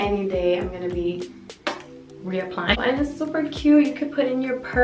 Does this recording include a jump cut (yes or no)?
yes